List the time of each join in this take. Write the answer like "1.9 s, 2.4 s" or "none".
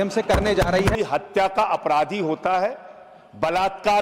1.0 s